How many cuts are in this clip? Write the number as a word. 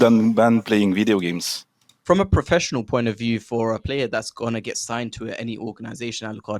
one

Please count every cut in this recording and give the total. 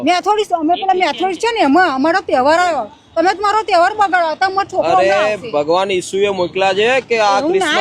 zero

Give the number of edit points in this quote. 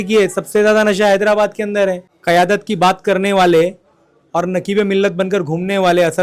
one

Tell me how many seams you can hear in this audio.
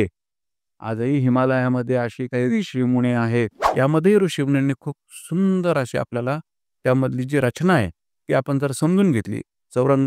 one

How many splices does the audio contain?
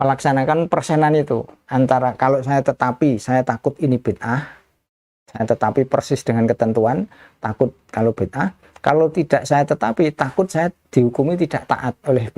zero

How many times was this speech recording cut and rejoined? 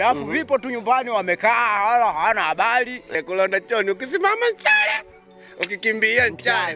one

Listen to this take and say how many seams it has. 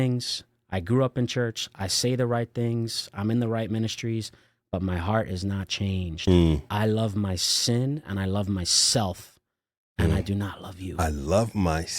one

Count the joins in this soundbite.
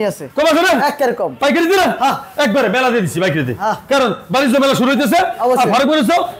zero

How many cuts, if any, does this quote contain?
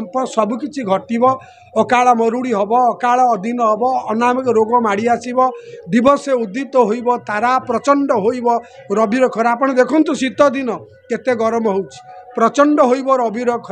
zero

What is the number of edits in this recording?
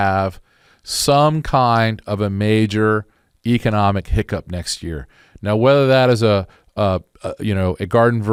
zero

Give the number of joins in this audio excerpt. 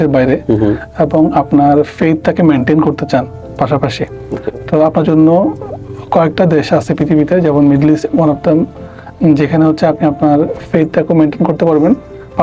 zero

